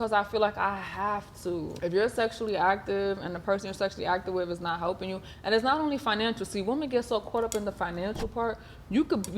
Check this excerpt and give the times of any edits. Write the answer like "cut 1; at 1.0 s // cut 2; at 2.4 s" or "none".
cut 1; at 1.7 s